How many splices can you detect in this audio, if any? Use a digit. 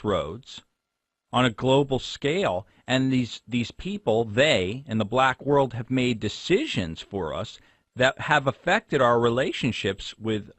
1